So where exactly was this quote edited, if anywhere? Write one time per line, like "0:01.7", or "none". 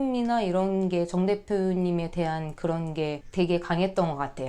0:03.2